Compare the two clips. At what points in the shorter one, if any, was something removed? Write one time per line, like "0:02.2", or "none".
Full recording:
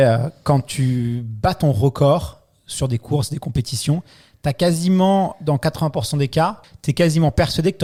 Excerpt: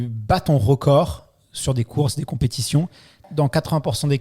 0:03.3